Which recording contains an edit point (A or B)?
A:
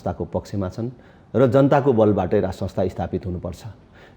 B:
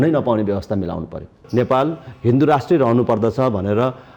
B